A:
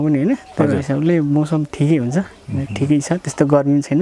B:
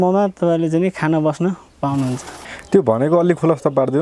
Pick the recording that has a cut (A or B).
B